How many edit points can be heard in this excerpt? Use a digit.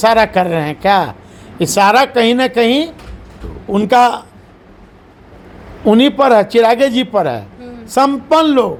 0